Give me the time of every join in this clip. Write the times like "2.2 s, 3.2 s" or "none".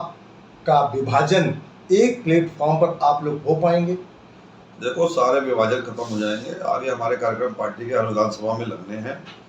none